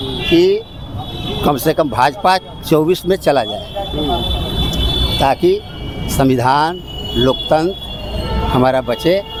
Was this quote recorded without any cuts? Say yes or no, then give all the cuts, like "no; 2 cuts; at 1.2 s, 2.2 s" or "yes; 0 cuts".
yes; 0 cuts